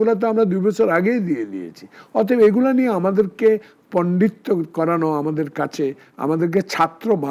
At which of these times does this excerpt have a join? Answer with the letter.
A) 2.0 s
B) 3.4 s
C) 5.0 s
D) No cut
D